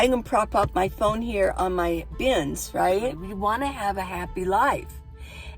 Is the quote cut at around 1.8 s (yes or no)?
no